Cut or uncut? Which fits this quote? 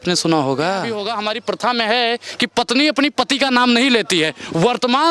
cut